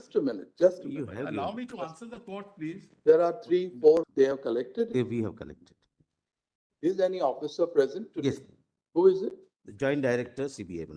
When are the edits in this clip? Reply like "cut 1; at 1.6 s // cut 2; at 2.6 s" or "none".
cut 1; at 4.1 s